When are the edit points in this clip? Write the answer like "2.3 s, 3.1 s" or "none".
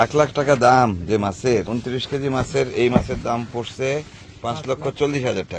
1.7 s, 4.3 s